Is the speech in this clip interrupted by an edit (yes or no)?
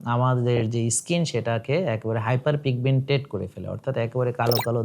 no